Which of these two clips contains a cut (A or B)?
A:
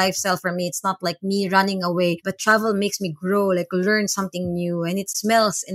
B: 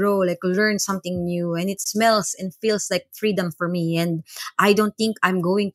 A